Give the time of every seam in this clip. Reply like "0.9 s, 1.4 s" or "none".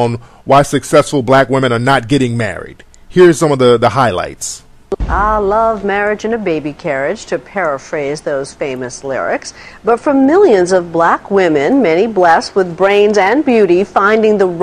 3.7 s